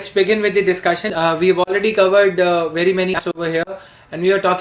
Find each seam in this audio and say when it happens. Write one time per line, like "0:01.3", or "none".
0:01.1
0:03.2